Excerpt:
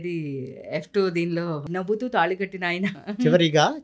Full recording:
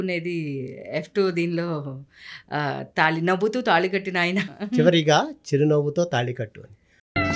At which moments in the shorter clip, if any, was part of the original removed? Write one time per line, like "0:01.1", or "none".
0:01.7

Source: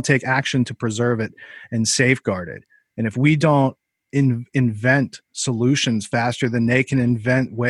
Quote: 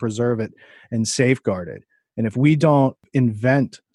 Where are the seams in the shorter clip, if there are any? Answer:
0:03.0

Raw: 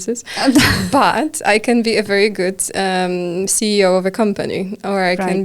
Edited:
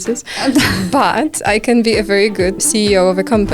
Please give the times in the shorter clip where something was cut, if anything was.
0:02.6

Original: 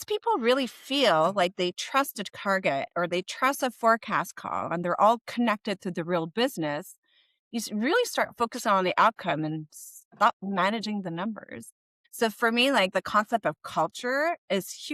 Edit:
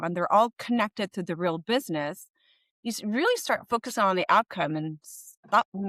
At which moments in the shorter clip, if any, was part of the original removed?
none

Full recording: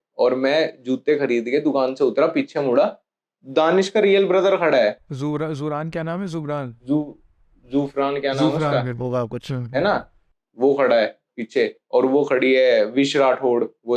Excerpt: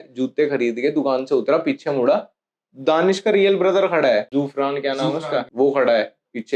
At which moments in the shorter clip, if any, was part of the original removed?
0:04.3
0:05.5

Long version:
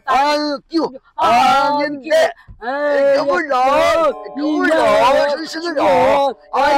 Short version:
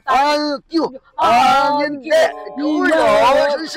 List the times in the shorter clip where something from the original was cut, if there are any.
0:02.5

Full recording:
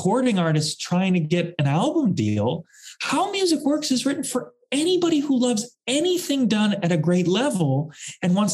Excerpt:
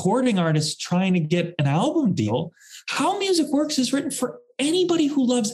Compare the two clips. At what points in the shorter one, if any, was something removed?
0:02.3

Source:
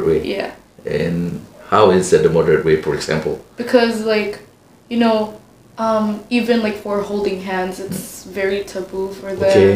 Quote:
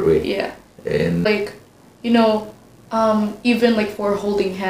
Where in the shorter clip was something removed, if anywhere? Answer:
0:01.3

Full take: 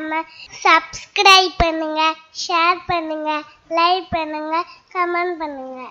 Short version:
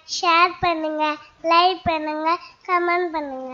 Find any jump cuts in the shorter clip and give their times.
none

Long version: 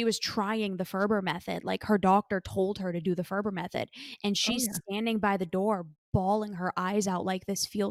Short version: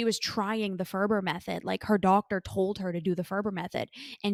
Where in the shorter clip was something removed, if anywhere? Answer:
none

